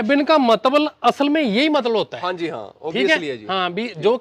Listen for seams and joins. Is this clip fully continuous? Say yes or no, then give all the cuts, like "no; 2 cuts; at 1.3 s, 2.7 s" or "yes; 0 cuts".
yes; 0 cuts